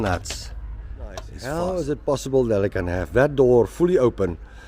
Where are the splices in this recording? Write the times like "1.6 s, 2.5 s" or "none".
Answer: 1.4 s